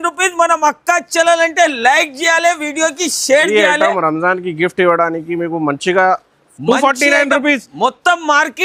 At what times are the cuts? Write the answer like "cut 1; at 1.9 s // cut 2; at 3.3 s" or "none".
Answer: none